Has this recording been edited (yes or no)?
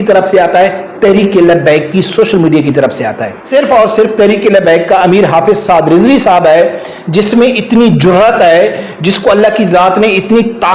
yes